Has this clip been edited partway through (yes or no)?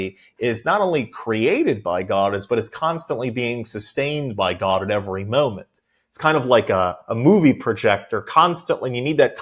no